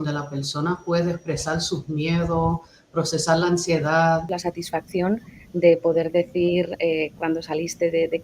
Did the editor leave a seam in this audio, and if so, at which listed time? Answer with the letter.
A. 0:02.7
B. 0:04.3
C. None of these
B